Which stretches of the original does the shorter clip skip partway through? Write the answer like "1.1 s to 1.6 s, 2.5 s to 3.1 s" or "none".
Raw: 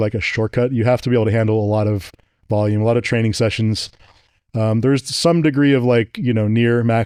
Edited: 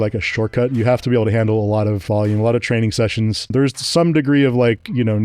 2.0 s to 2.4 s, 3.9 s to 4.8 s

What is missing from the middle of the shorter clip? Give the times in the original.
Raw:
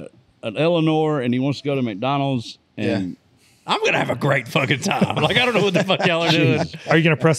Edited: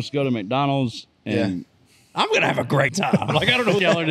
4.4 s to 4.8 s

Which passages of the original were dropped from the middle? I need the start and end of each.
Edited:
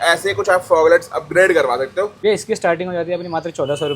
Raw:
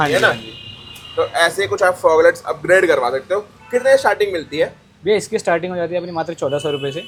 3.5 s to 5.0 s

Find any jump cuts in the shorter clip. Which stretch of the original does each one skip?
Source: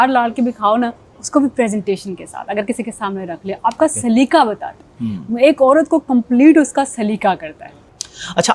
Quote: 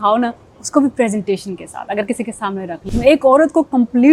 3.4 s to 5.2 s

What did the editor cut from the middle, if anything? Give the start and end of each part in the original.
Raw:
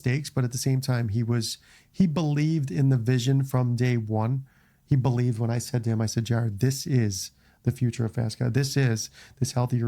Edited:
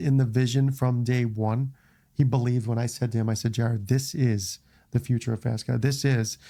none

